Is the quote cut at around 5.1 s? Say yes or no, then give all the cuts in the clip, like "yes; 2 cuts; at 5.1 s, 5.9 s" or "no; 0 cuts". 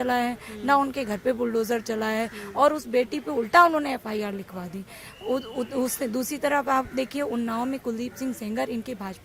no; 0 cuts